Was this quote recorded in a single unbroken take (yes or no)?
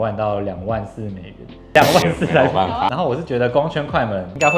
no